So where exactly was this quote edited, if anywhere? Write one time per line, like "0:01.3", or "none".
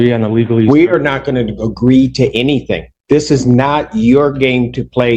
none